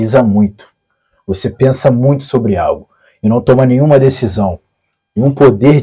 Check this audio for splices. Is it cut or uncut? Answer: uncut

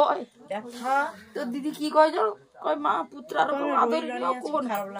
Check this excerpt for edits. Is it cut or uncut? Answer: uncut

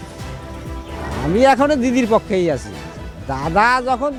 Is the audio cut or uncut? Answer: uncut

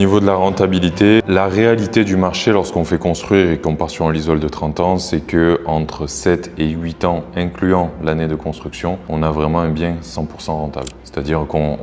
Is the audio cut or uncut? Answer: cut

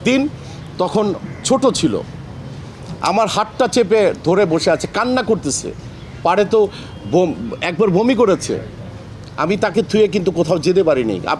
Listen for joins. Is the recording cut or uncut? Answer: uncut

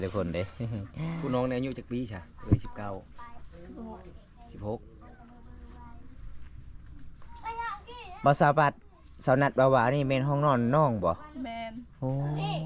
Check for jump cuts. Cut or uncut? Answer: uncut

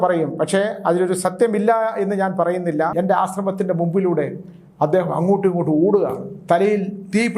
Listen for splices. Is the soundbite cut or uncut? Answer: cut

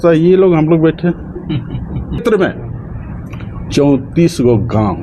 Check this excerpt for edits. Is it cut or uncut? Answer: cut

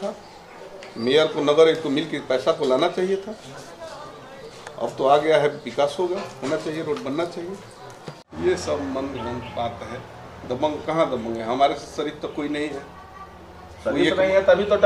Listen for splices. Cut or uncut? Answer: cut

